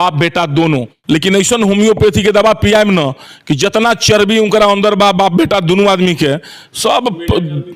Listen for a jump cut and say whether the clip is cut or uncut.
cut